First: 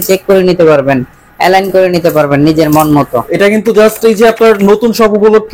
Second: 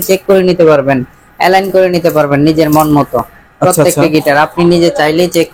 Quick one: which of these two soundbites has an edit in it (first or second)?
first